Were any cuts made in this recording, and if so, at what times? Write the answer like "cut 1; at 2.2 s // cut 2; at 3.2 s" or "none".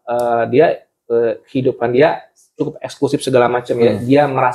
none